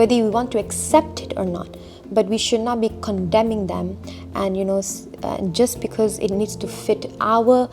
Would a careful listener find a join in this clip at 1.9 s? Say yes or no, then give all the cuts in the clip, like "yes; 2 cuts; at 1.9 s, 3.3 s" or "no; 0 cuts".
no; 0 cuts